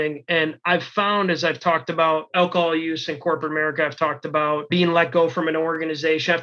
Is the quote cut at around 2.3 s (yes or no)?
yes